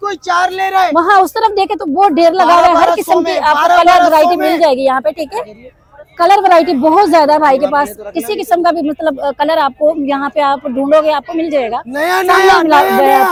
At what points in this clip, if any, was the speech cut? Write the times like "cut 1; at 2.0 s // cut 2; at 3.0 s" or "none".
none